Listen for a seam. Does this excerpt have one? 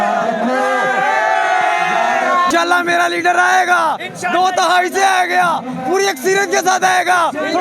yes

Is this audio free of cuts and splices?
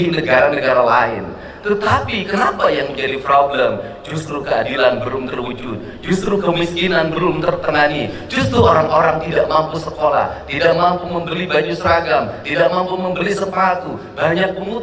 yes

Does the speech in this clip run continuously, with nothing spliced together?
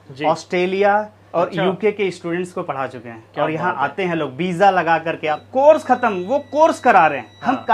no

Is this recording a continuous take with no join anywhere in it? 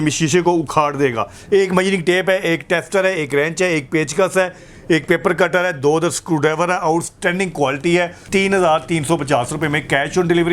no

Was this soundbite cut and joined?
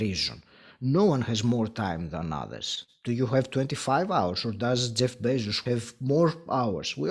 yes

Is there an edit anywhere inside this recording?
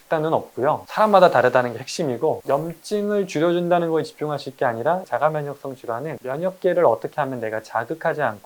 yes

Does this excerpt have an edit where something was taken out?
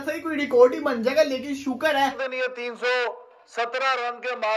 yes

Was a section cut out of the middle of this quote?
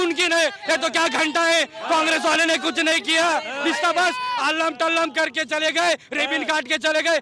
no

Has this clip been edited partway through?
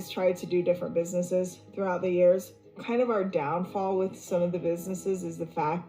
no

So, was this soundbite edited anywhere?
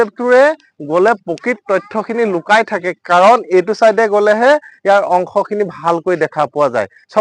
no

